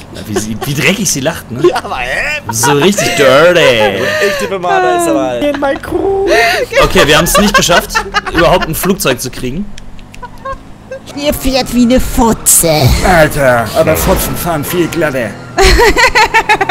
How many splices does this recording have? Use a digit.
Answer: 2